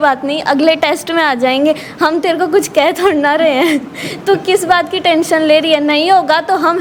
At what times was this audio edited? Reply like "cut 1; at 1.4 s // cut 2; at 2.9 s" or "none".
none